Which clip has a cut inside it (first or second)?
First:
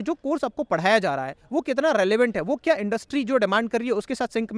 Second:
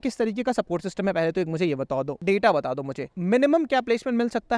second